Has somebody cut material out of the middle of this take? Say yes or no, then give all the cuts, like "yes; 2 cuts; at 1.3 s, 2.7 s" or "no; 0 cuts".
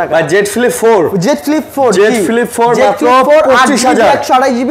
no; 0 cuts